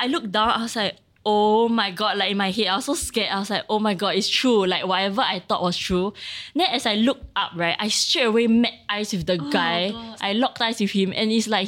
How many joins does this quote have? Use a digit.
1